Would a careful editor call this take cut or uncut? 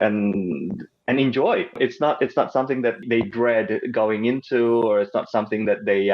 cut